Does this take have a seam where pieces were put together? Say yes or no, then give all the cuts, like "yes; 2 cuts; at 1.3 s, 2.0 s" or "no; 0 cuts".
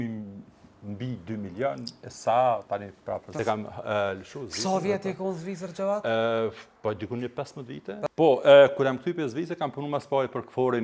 yes; 2 cuts; at 3.4 s, 8.1 s